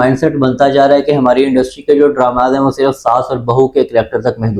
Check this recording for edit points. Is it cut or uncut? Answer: uncut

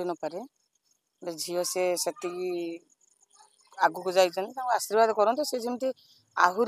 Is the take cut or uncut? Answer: uncut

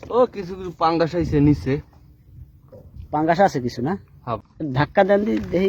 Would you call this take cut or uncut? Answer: cut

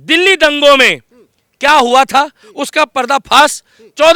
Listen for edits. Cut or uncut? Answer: uncut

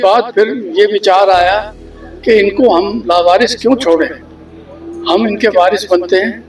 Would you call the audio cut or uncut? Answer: uncut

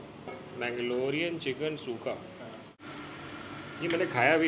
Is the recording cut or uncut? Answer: uncut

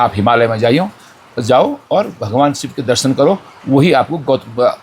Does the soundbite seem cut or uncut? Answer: uncut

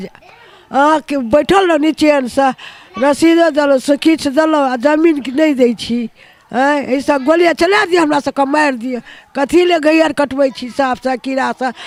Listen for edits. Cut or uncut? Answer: uncut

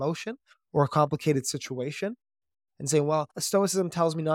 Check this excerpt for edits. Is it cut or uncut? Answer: cut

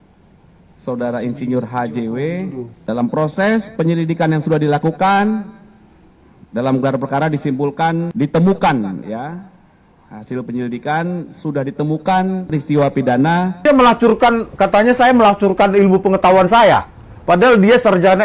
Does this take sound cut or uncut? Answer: cut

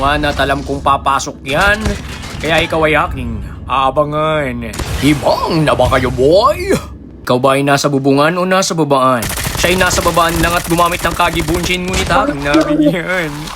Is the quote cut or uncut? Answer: cut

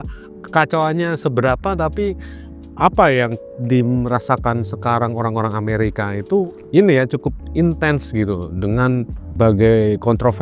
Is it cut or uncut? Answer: cut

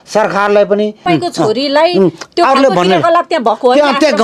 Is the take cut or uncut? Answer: cut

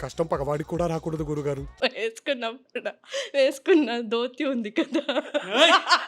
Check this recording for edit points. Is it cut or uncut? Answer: cut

